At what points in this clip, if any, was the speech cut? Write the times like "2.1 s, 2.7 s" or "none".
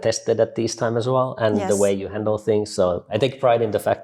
3.1 s

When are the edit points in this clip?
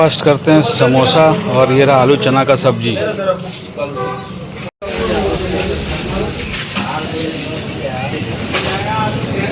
none

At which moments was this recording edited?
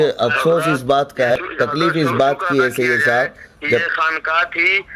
1.3 s

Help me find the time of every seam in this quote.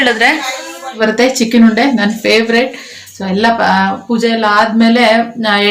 1.0 s

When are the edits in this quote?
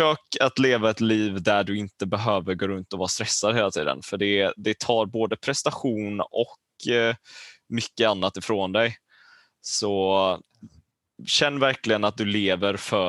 none

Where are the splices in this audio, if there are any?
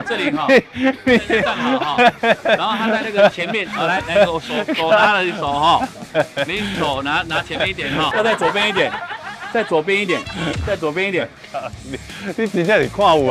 8.1 s

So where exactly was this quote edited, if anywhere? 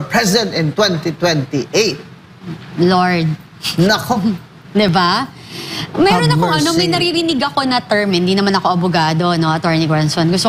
none

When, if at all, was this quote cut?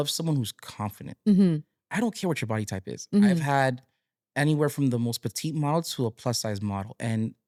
none

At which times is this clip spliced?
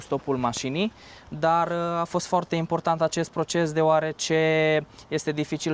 none

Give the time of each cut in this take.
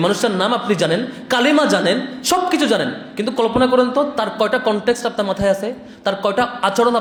none

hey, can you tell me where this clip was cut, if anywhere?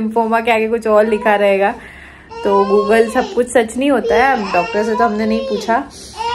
none

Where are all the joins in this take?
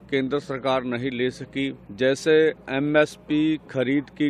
1.8 s

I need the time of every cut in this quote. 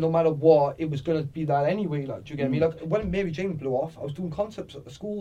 2.8 s

